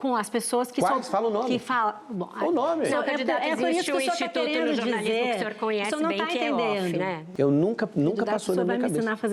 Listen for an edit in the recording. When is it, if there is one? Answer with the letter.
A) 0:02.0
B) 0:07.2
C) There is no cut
B